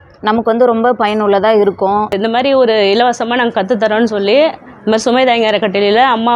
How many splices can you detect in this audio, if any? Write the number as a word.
one